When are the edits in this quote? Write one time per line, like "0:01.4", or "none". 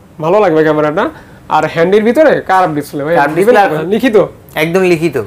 0:03.8